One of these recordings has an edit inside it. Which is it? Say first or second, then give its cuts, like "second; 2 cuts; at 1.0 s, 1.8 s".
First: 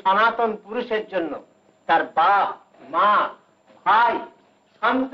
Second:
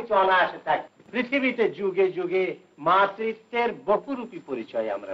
second; 1 cut; at 1.0 s